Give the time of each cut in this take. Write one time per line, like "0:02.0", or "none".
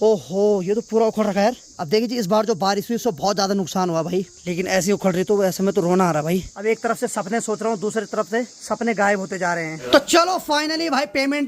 0:01.7
0:04.3
0:06.5
0:08.6
0:09.9